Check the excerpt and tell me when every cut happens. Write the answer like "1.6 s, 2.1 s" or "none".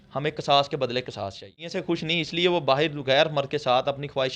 1.7 s